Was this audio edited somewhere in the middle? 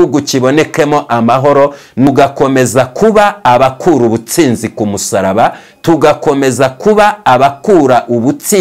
yes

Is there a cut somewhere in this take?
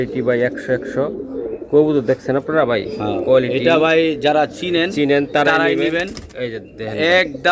no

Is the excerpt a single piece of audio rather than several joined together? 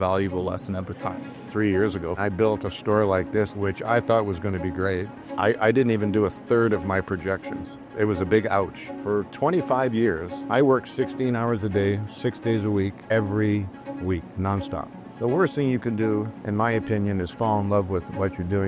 no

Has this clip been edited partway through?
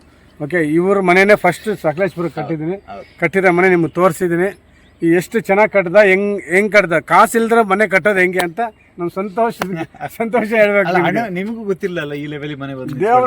no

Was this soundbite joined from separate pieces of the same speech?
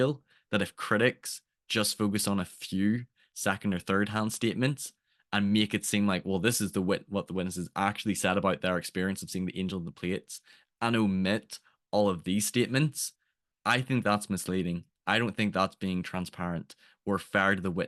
no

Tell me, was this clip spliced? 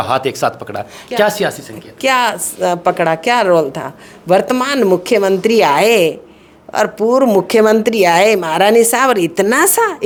no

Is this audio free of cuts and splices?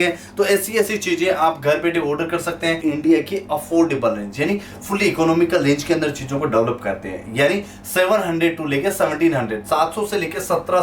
no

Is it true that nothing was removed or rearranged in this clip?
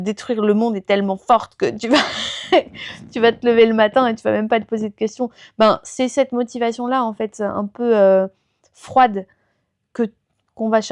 yes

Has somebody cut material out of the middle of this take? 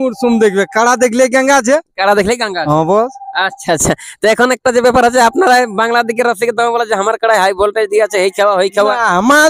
no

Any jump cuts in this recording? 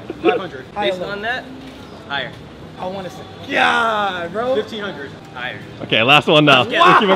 no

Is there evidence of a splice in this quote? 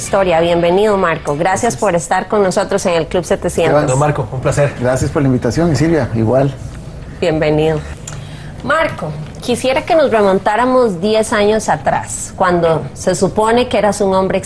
yes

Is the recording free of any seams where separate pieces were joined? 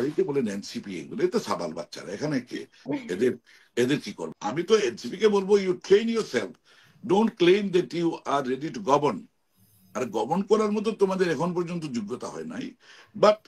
no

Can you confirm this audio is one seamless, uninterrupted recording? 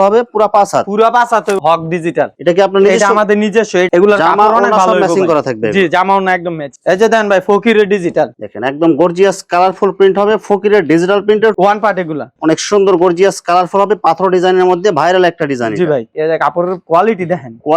no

